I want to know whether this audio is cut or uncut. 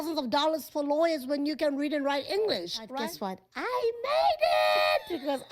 cut